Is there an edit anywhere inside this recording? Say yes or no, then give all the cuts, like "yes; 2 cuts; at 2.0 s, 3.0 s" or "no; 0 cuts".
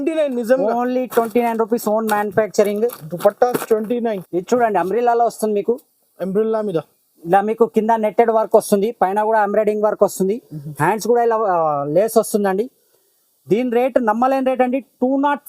yes; 1 cut; at 4.1 s